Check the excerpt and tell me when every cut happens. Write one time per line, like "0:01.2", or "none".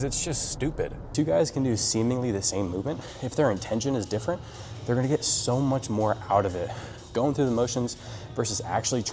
0:01.0
0:03.1